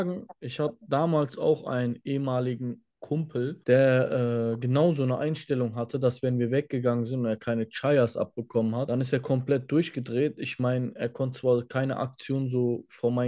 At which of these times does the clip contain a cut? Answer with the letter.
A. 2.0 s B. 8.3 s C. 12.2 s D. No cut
D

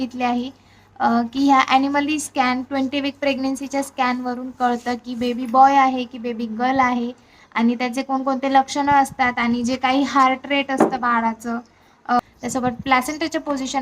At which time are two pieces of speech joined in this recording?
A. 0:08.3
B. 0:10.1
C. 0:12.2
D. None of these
C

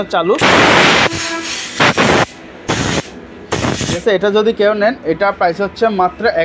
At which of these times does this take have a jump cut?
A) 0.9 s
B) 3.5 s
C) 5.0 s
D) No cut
D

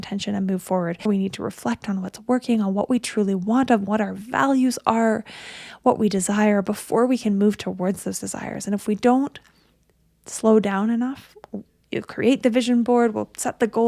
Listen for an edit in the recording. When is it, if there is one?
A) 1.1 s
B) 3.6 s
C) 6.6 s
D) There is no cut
A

